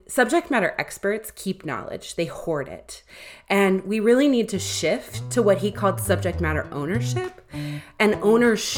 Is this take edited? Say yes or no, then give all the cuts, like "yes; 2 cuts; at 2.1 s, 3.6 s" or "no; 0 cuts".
no; 0 cuts